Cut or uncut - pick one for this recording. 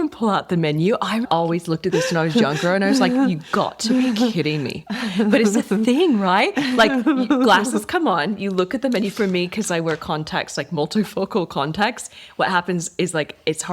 cut